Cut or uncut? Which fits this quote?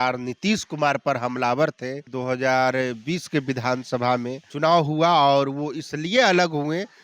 cut